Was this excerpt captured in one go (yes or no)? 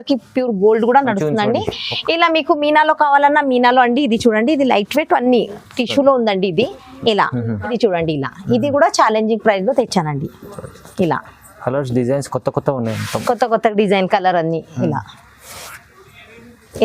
no